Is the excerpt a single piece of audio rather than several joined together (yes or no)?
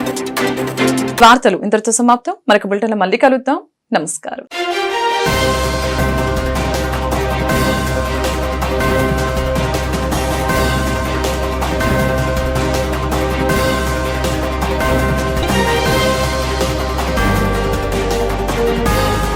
yes